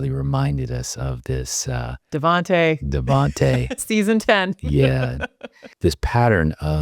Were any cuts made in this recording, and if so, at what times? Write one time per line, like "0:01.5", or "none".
0:05.7